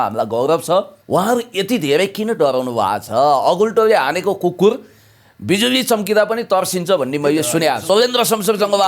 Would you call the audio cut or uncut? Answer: cut